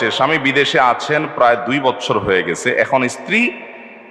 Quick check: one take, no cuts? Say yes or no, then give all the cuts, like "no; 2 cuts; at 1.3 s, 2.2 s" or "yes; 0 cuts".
yes; 0 cuts